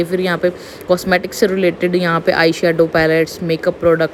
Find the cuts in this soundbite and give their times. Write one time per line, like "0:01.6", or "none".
none

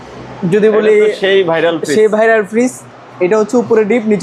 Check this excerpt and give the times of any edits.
none

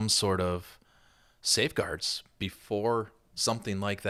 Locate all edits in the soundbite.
none

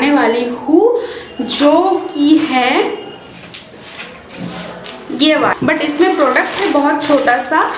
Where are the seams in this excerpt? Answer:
0:05.5

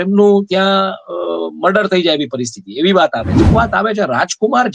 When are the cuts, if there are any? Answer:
0:03.5

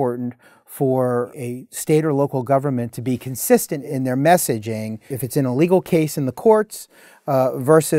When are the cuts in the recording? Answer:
0:01.4
0:03.8
0:05.1

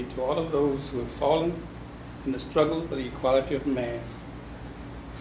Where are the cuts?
none

